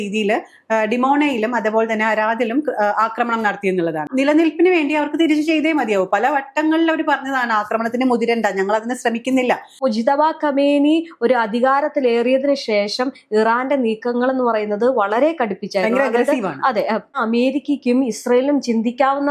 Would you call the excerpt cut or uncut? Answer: cut